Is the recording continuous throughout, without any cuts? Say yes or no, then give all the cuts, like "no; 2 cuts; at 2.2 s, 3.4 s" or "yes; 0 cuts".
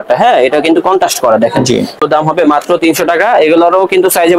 no; 1 cut; at 2.0 s